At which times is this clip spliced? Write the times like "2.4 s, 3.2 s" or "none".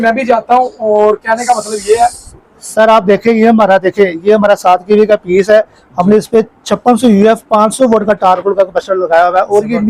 none